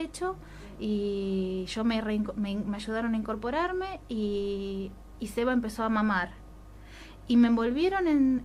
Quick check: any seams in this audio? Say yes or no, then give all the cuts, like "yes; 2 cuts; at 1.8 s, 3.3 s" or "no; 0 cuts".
yes; 1 cut; at 6.3 s